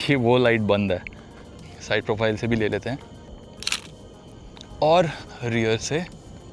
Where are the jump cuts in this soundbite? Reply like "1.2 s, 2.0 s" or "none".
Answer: none